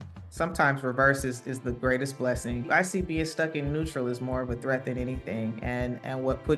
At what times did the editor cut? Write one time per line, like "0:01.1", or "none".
0:02.7